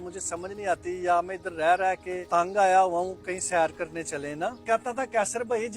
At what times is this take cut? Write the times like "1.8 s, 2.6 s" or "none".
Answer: 2.1 s, 4.6 s

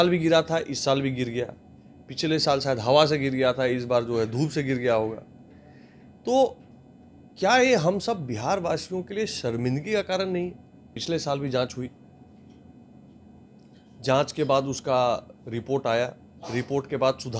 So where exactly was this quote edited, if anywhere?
10.9 s

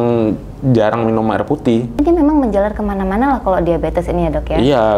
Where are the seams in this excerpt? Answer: 1.9 s

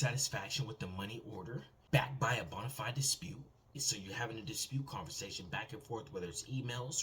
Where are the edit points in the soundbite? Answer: 1.8 s, 3.8 s

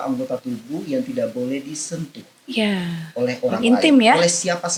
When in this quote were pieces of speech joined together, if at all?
none

